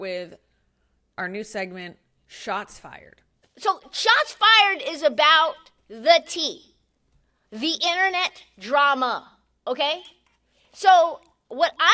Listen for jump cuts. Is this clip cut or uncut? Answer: cut